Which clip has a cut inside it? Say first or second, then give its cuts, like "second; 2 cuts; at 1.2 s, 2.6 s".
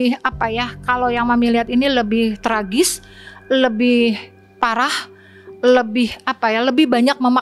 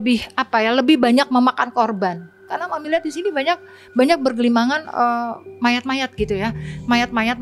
second; 1 cut; at 2.5 s